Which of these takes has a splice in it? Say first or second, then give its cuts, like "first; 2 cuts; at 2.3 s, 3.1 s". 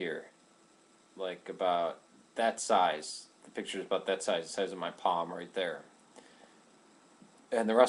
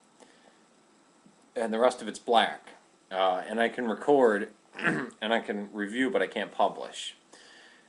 second; 1 cut; at 4.2 s